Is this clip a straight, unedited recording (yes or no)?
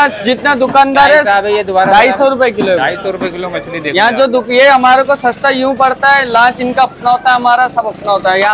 yes